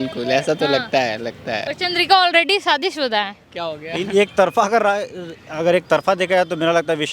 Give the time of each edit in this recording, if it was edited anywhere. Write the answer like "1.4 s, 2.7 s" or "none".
none